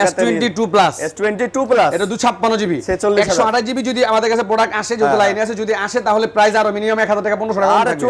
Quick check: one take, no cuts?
yes; 0 cuts

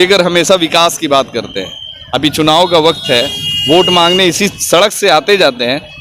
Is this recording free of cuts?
yes; 0 cuts

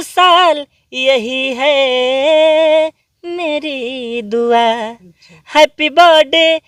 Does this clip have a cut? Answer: no; 0 cuts

